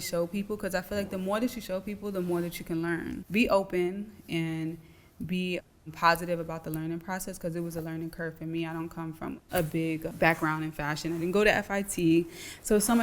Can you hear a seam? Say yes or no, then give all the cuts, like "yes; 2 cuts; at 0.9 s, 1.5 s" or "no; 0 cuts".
yes; 3 cuts; at 3.2 s, 9.4 s, 10.1 s